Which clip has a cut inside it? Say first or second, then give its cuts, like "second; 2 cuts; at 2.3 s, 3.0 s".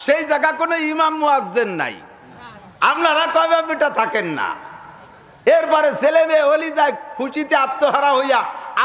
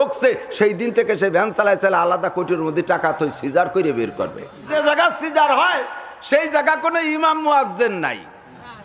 second; 1 cut; at 4.7 s